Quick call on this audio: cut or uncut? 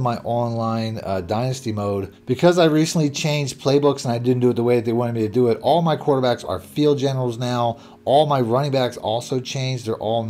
uncut